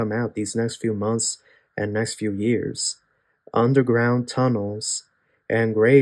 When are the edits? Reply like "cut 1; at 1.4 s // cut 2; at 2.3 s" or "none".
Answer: none